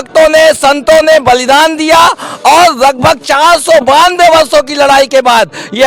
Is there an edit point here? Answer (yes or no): no